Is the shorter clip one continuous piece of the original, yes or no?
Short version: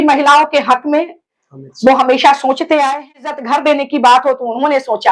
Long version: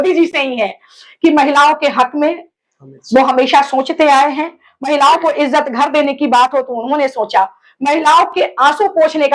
no